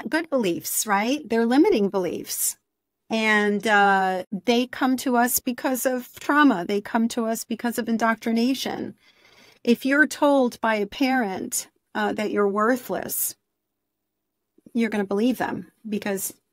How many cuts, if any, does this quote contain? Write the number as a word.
one